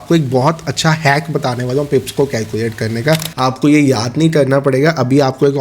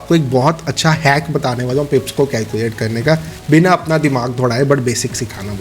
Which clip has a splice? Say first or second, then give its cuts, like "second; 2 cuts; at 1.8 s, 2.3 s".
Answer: first; 1 cut; at 3.3 s